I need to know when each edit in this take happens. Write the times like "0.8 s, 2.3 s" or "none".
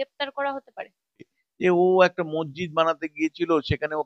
1.4 s